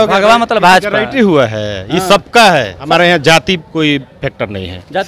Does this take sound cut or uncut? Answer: cut